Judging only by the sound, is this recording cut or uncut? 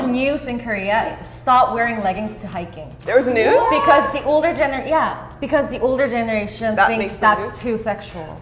uncut